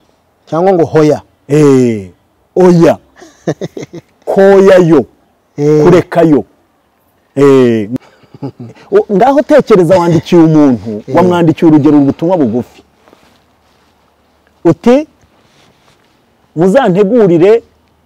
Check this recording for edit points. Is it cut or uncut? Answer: cut